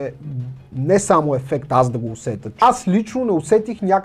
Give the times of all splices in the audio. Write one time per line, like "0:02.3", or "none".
0:02.6